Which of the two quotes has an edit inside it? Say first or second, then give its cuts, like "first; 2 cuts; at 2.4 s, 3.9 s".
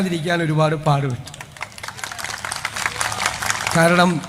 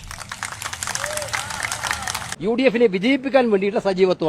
second; 1 cut; at 2.3 s